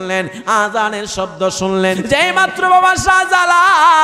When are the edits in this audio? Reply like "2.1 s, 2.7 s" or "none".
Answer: 2.0 s